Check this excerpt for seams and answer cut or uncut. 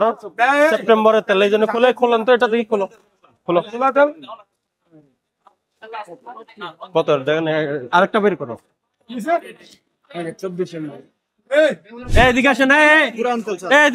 cut